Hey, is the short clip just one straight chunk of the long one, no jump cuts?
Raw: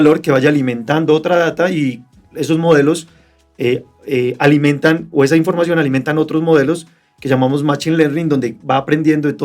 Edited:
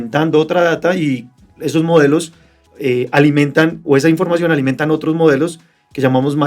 no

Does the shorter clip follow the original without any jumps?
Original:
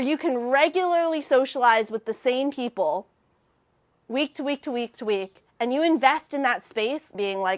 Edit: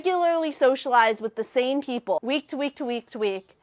no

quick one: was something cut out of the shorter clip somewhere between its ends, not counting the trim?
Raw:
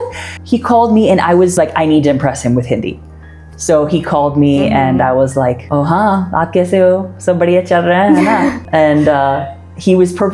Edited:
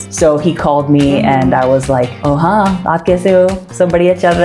no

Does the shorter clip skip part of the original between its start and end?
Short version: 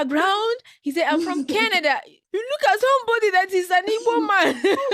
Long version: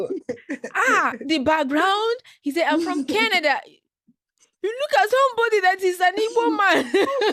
yes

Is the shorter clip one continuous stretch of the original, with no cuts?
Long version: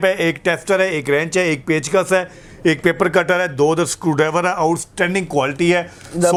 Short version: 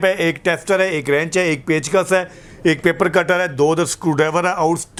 yes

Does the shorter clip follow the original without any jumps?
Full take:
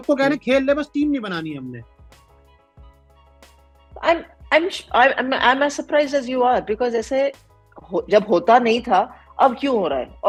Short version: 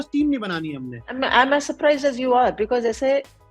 no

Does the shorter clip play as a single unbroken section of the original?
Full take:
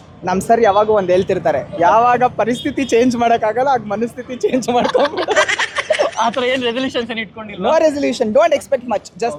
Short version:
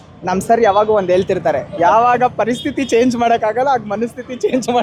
yes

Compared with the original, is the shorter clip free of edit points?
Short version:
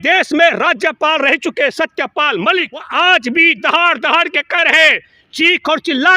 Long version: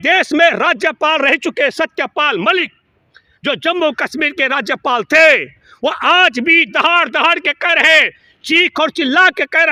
no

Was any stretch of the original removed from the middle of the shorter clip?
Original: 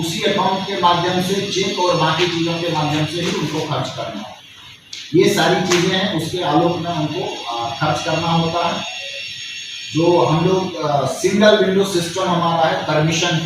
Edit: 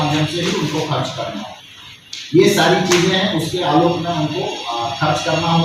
no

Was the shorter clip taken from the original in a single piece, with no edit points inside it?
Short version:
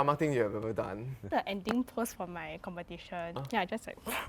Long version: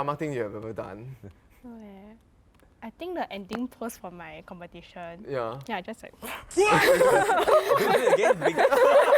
no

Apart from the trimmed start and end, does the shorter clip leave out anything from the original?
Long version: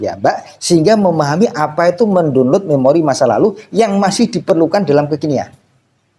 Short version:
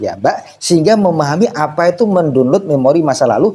no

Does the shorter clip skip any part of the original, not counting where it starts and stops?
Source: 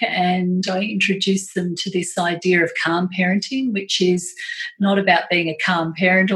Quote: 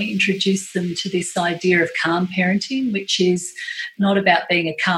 no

